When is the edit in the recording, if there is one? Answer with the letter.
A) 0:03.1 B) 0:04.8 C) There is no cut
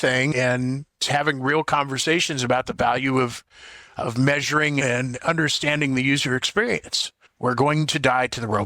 B